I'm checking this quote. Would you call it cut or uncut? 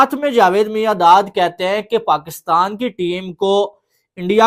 uncut